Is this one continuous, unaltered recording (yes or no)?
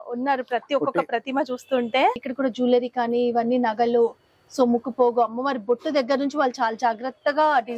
no